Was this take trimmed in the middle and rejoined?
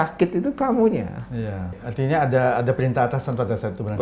yes; 1 cut; at 1.8 s

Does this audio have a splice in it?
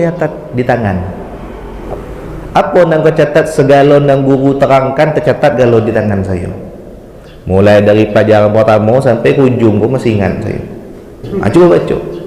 yes; 2 cuts; at 1.7 s, 11.2 s

